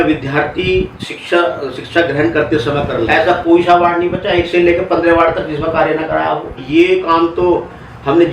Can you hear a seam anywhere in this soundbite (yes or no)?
yes